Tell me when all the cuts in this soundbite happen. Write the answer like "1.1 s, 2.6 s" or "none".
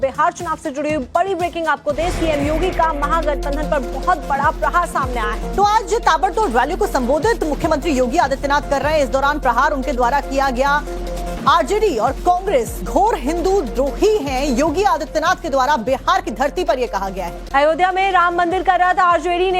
1.6 s